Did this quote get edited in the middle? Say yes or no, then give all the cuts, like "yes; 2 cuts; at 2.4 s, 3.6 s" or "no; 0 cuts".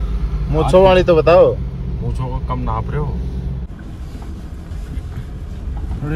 yes; 1 cut; at 3.6 s